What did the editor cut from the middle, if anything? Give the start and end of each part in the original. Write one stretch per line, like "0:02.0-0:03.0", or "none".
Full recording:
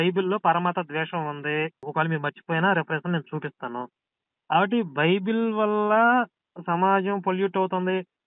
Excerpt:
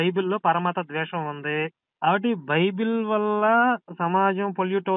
0:01.8-0:04.3
0:06.4-0:06.6